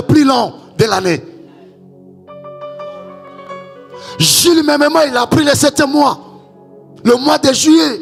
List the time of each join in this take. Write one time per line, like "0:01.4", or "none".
none